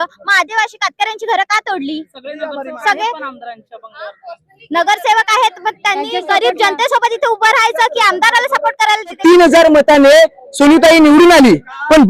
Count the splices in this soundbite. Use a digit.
1